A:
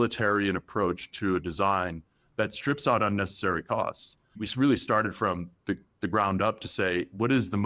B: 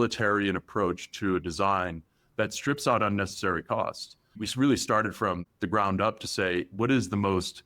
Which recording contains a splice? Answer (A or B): B